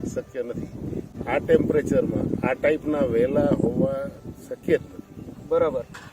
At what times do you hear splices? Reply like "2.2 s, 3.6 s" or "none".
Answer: 1.1 s